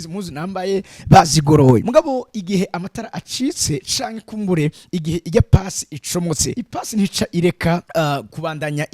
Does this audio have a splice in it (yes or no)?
yes